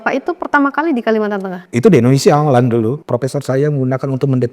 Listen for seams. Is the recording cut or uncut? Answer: cut